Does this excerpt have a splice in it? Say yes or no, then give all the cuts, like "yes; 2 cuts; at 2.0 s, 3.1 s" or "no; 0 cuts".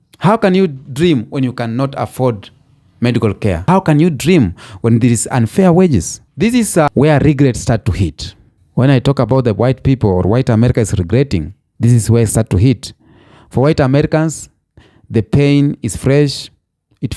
yes; 2 cuts; at 3.6 s, 6.2 s